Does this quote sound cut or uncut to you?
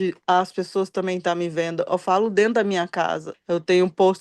cut